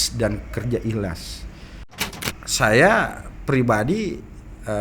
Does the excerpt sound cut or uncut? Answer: cut